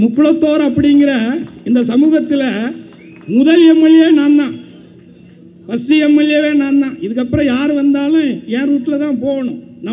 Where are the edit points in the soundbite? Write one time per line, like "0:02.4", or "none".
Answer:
none